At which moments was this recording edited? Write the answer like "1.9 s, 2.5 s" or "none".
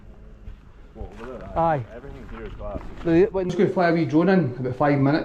3.5 s